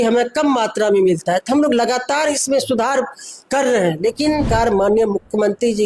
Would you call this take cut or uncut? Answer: cut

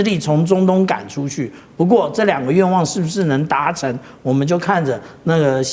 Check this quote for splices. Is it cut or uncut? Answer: uncut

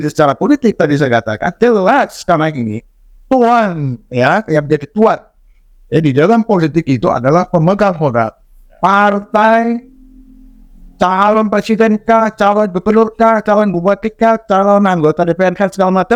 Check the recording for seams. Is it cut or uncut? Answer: uncut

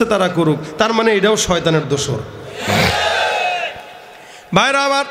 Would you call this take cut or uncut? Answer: cut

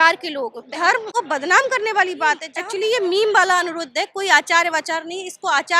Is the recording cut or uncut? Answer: cut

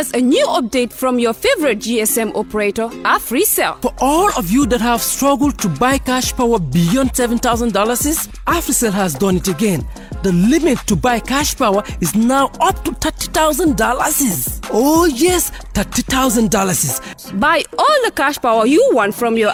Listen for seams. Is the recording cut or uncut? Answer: uncut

